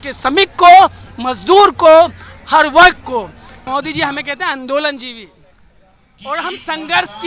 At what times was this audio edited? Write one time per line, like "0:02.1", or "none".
0:03.6